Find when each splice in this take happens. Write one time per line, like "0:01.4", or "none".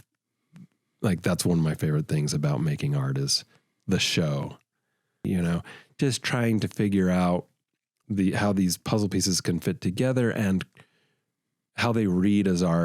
0:05.2